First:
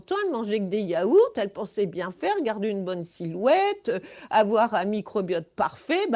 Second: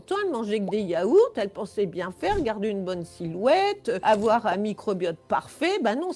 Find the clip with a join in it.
second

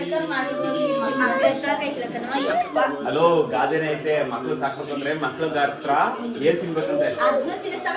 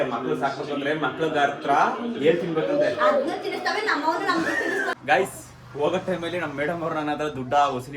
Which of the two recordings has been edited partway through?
second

